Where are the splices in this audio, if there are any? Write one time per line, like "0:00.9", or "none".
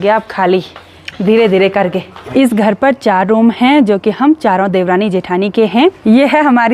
0:02.1
0:06.0